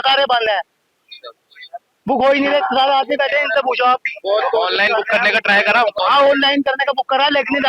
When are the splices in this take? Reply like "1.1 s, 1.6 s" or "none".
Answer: none